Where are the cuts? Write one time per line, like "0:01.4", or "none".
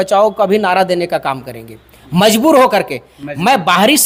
none